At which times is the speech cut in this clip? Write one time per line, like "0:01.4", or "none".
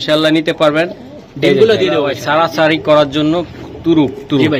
0:02.2